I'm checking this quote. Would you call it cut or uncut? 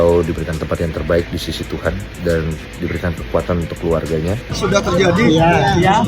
cut